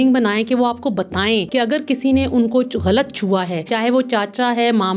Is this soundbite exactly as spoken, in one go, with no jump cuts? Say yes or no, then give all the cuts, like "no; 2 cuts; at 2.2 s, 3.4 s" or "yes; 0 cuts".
no; 2 cuts; at 1.5 s, 3.7 s